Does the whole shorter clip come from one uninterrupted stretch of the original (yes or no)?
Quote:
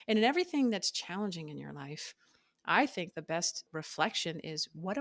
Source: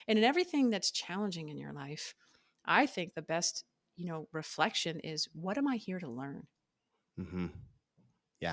no